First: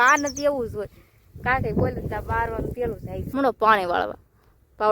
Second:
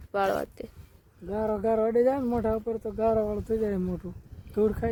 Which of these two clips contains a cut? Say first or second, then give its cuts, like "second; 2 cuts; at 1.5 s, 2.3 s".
first; 1 cut; at 3.1 s